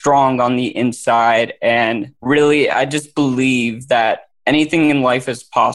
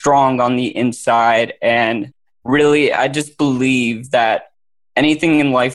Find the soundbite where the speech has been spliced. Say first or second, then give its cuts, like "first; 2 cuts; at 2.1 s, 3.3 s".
first; 2 cuts; at 2.1 s, 4.3 s